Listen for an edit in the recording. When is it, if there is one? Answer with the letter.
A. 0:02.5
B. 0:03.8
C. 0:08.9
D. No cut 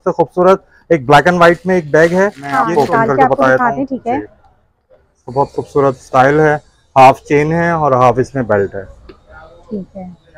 A